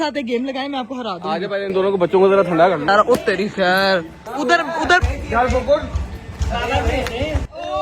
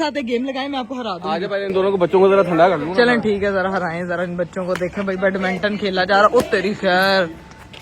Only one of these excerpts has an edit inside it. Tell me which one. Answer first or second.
first